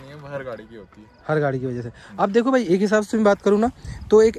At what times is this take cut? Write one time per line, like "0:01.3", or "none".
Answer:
none